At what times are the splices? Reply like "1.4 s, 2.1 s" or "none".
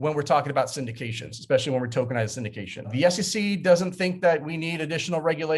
2.9 s

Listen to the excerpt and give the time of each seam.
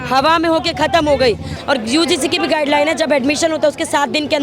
1.5 s

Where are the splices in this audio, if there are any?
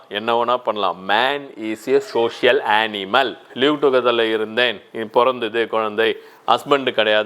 3.5 s

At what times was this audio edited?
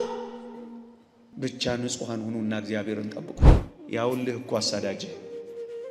3.6 s

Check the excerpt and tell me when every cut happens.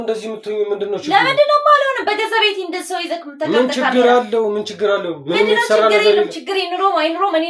none

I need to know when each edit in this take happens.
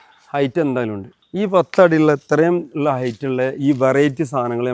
1.1 s

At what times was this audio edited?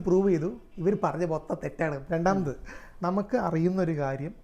2.0 s

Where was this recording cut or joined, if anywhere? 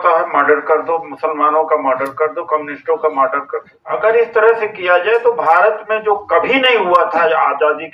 3.7 s

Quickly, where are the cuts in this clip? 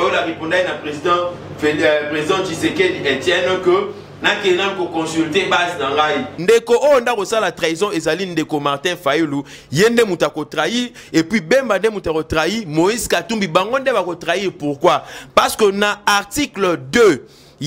6.4 s

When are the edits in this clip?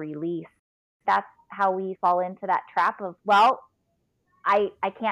0.8 s, 1.9 s

